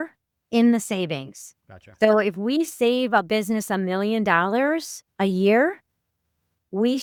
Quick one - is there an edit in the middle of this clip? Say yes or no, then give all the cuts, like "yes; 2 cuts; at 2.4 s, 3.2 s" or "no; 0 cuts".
no; 0 cuts